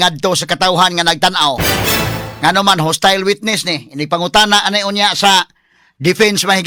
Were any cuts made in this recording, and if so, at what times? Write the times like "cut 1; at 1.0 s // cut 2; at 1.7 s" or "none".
none